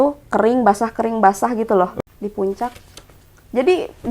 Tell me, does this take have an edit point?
yes; 1 cut; at 2.0 s

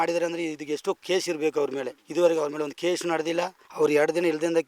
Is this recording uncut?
no; 2 cuts; at 2.0 s, 3.6 s

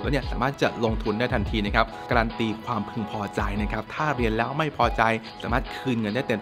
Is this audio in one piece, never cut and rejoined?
no; 2 cuts; at 2.0 s, 5.3 s

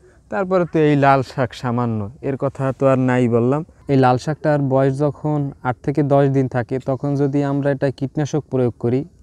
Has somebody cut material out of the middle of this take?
yes; 1 cut; at 3.8 s

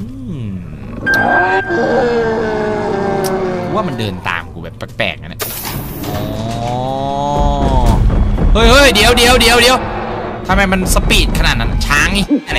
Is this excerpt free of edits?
yes; 0 cuts

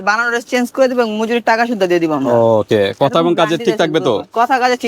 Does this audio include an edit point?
no; 0 cuts

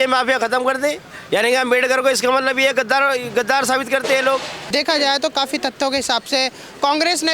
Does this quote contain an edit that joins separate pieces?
yes; 2 cuts; at 1.1 s, 4.6 s

